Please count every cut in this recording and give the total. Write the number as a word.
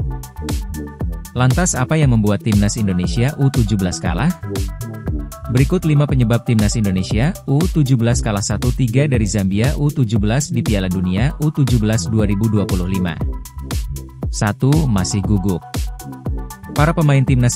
one